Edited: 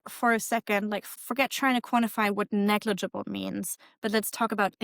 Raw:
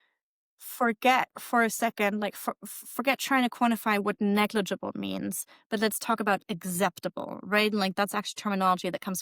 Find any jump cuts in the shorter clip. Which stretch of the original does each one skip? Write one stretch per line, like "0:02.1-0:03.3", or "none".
0:02.4-0:02.8